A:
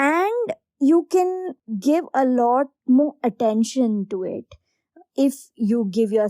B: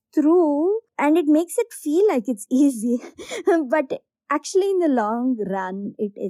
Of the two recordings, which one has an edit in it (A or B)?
A